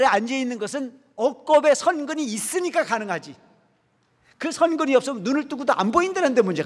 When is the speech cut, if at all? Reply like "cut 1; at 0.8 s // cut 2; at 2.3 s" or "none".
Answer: none